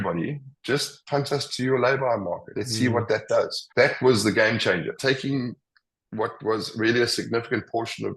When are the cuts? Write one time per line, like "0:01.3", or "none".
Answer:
0:02.6
0:03.6
0:05.0